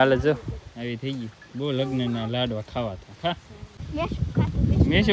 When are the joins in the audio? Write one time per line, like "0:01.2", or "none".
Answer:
0:03.8

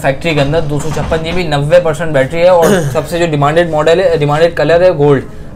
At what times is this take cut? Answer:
none

